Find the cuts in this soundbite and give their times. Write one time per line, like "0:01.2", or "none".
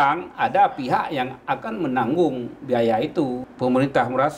0:03.4